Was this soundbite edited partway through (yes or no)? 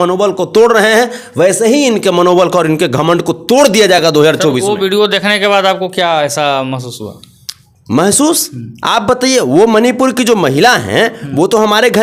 no